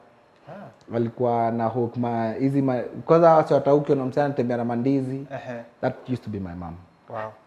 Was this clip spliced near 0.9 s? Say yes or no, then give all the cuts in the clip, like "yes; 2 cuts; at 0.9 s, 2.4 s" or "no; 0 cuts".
no; 0 cuts